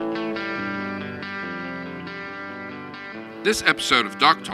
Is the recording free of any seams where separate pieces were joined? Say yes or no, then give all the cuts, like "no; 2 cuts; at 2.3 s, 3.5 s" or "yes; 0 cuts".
no; 1 cut; at 3.4 s